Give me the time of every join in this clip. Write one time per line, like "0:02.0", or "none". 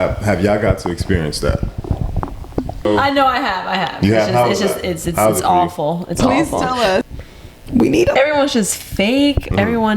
0:02.9
0:07.0